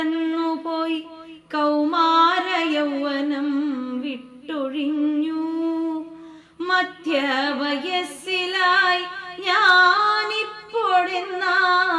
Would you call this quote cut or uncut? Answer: uncut